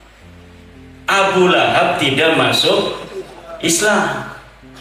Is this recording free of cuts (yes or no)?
yes